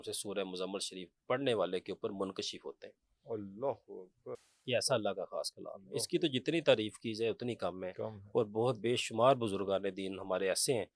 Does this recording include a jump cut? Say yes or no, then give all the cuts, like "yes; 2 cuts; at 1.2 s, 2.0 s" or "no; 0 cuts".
no; 0 cuts